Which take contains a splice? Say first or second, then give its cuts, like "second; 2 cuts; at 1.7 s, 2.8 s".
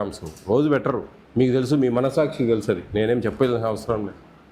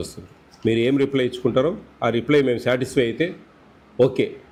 first; 1 cut; at 1.2 s